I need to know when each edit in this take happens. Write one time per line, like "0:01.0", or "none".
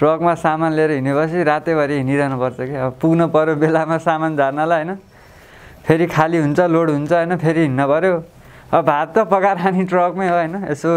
none